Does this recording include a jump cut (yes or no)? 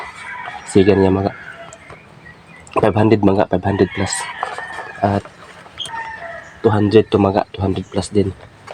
yes